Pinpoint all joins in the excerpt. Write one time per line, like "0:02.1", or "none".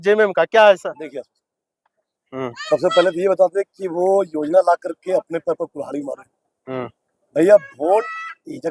none

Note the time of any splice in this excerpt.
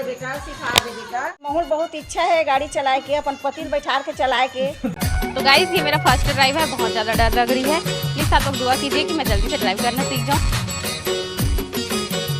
0:01.4
0:05.0

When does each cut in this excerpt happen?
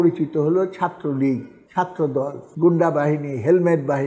0:02.4

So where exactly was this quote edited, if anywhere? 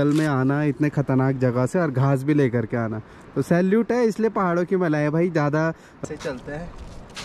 0:06.0

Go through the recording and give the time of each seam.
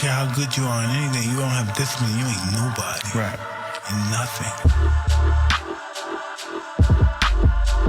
none

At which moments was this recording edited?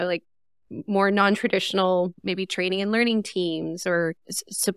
0:02.2

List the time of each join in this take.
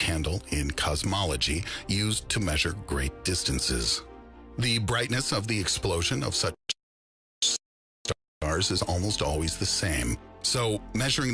0:09.3

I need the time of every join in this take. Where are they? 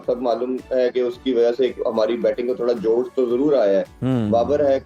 none

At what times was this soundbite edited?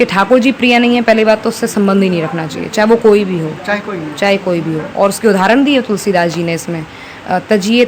none

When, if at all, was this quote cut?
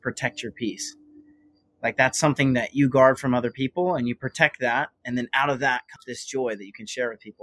0:05.9

